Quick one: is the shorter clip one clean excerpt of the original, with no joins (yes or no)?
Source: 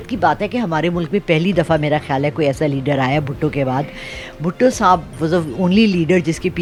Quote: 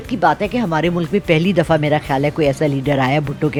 yes